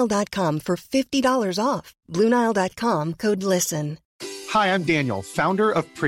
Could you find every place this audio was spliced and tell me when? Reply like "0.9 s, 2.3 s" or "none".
4.0 s